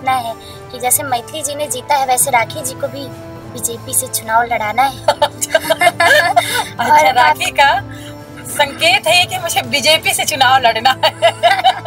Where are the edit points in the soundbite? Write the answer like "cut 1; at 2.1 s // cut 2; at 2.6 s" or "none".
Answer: none